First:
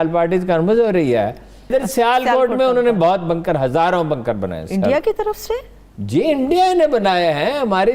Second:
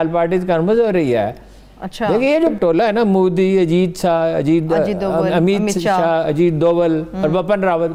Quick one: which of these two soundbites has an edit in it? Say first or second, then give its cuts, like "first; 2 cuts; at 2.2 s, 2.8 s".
first; 1 cut; at 1.7 s